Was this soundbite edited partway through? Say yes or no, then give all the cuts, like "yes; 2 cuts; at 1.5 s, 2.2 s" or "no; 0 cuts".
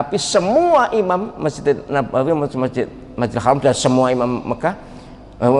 no; 0 cuts